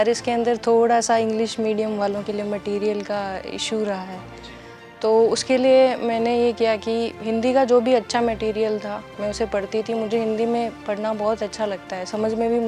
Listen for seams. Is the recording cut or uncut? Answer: uncut